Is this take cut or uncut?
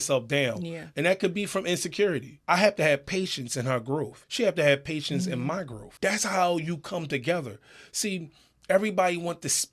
cut